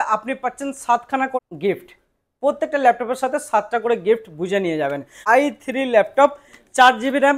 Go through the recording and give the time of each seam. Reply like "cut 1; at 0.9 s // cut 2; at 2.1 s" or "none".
cut 1; at 1.4 s // cut 2; at 5.2 s